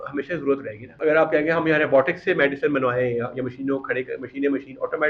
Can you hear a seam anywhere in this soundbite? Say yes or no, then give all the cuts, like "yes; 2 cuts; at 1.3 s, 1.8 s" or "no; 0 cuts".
yes; 1 cut; at 1.0 s